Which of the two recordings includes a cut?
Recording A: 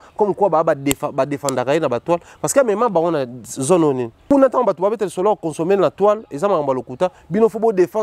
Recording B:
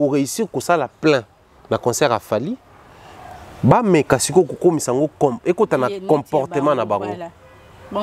A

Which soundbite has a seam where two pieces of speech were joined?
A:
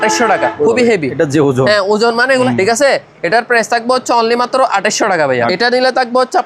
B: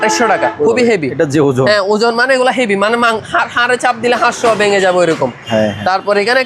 A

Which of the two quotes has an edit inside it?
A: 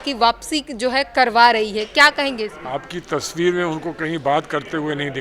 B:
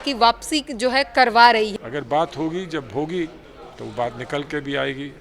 B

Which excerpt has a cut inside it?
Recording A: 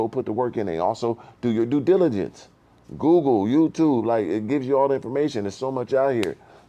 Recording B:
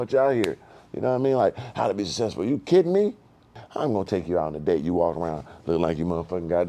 B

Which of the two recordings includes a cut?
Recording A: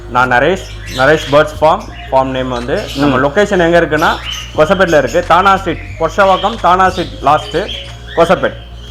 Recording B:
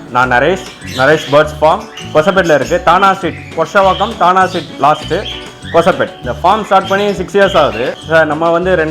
B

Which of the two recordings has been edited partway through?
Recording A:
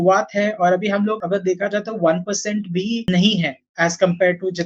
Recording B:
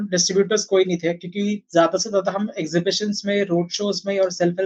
A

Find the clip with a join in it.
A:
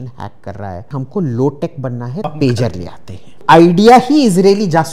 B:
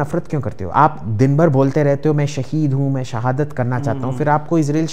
A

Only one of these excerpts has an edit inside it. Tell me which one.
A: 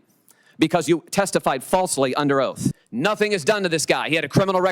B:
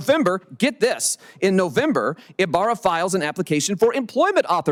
A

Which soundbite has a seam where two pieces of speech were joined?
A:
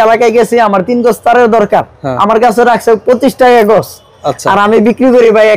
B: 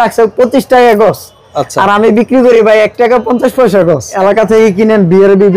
B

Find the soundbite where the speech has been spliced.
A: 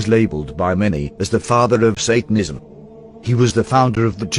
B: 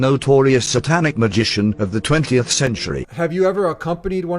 B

